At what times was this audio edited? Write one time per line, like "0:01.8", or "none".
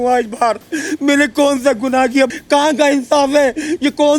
0:02.3